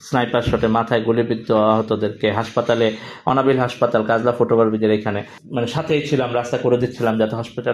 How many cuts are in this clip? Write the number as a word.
one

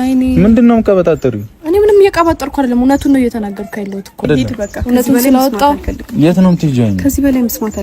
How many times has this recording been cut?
one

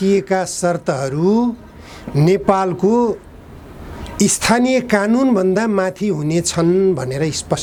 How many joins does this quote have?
zero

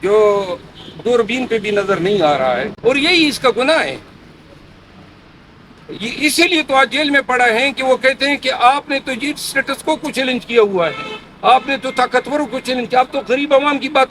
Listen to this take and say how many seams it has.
one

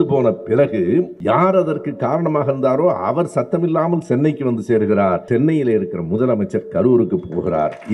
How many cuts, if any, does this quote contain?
two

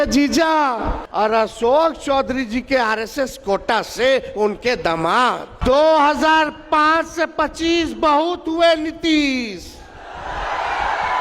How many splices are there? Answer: two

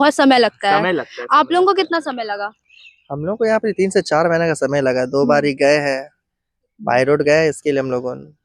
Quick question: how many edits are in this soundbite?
zero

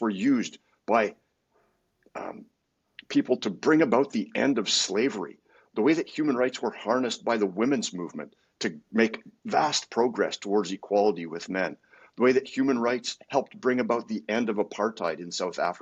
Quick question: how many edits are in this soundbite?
zero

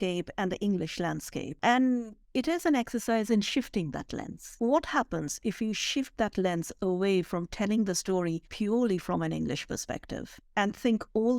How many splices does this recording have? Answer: three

